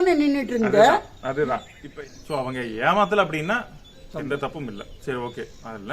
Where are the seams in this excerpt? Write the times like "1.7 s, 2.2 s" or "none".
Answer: 1.8 s